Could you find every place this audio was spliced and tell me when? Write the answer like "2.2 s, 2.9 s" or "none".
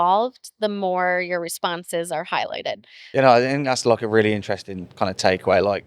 3.0 s